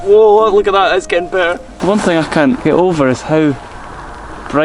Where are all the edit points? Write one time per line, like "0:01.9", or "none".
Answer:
0:01.7
0:02.6